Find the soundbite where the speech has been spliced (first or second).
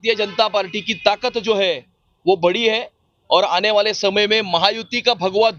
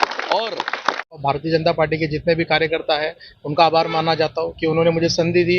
second